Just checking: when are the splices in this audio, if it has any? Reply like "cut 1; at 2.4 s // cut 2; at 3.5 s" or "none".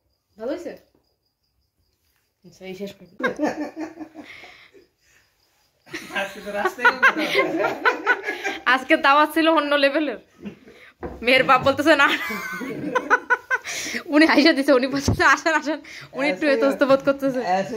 cut 1; at 3.1 s